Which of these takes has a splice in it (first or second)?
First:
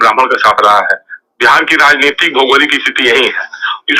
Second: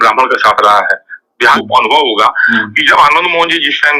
second